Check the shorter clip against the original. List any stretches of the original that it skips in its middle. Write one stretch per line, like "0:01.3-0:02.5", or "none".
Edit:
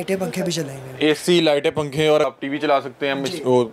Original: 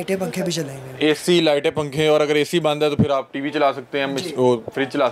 0:02.3-0:03.2